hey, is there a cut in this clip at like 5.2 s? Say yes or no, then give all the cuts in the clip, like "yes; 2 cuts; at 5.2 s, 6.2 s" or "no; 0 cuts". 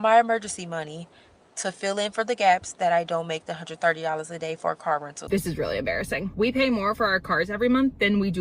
yes; 2 cuts; at 3.7 s, 5.2 s